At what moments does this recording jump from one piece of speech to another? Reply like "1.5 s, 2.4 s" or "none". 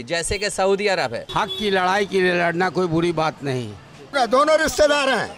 1.2 s, 4.1 s